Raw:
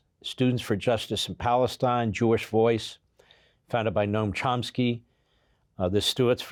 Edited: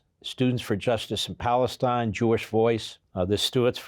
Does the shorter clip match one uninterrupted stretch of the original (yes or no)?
no